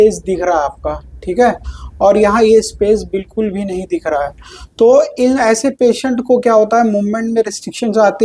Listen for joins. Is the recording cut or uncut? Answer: uncut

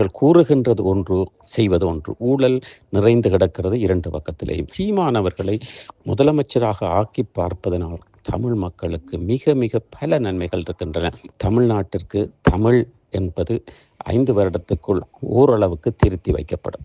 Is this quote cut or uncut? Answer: cut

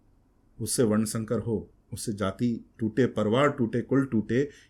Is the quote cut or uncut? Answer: uncut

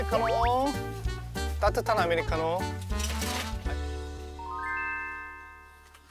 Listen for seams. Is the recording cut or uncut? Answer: cut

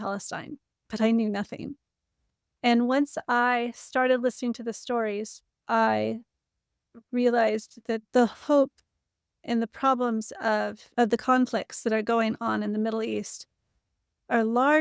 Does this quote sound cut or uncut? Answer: uncut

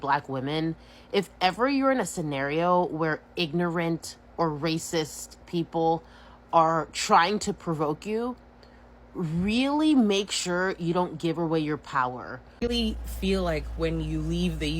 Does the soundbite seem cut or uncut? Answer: cut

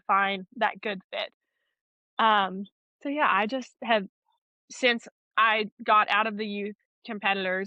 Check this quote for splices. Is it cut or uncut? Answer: uncut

